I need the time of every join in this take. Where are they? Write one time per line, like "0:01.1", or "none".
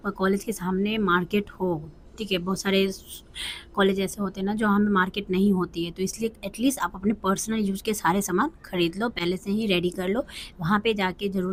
none